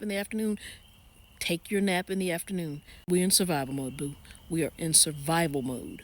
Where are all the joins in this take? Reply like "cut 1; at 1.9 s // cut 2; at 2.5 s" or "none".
cut 1; at 3.0 s